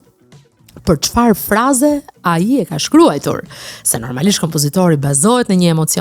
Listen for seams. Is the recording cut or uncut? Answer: uncut